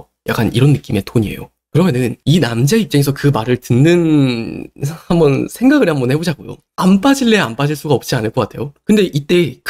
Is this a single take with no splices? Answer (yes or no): no